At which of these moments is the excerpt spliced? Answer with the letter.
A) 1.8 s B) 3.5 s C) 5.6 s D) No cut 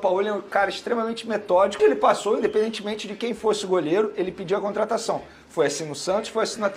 A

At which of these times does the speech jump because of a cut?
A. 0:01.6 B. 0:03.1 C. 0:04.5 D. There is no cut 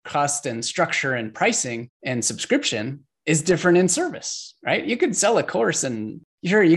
D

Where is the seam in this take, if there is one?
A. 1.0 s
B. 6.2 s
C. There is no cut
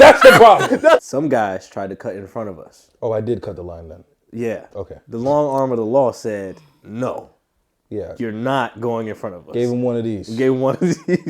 A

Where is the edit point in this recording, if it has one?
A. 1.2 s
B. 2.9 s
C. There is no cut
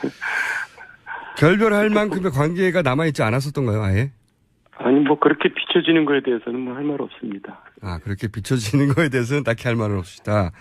A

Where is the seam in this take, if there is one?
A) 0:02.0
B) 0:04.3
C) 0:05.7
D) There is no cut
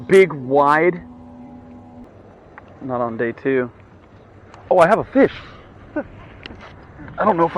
A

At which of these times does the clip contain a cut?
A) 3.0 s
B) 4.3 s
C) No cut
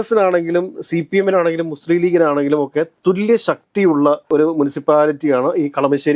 C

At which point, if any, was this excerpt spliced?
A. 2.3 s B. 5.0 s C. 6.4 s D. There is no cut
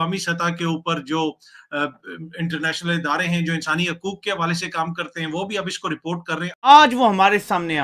C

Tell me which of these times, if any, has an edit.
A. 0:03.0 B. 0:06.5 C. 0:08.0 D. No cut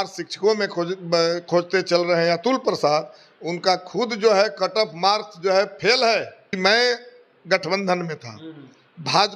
B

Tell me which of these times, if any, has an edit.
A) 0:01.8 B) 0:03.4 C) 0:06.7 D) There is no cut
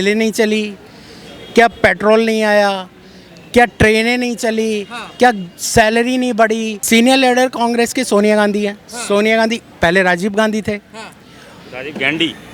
C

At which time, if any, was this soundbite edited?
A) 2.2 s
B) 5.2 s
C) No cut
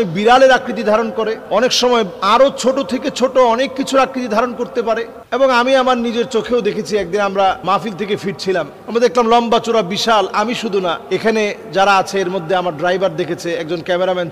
B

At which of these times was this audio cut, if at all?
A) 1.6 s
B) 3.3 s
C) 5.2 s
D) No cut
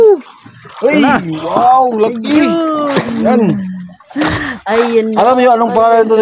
D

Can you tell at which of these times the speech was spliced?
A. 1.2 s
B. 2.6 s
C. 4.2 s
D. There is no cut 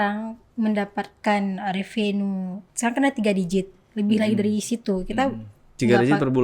B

